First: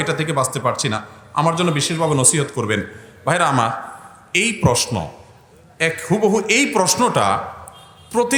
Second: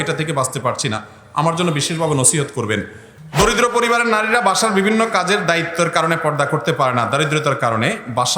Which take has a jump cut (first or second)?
second